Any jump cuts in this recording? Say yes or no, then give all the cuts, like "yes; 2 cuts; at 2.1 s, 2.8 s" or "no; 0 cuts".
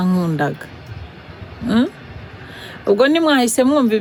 no; 0 cuts